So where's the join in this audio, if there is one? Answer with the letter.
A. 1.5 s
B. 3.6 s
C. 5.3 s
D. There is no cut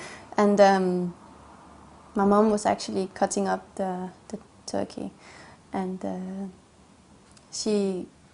A